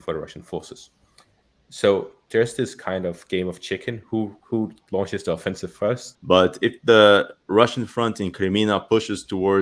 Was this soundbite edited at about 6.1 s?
yes; 1 cut; at 6.1 s

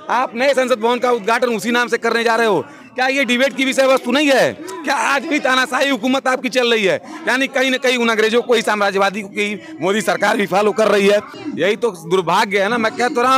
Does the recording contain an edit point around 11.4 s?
yes; 1 cut; at 11.4 s

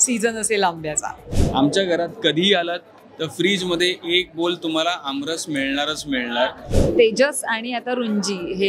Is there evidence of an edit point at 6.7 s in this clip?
yes; 2 cuts; at 1.2 s, 6.7 s

